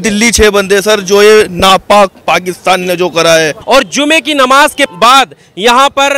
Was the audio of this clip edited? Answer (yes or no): yes